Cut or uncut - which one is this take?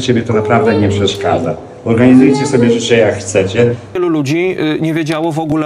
cut